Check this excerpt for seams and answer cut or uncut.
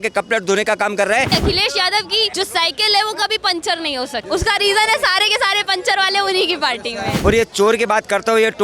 cut